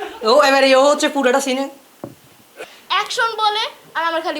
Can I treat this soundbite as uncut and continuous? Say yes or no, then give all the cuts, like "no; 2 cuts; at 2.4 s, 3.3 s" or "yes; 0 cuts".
no; 1 cut; at 2.7 s